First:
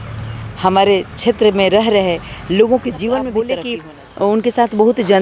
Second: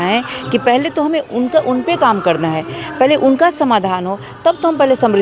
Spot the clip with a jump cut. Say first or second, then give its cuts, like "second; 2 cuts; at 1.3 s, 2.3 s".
first; 1 cut; at 3.5 s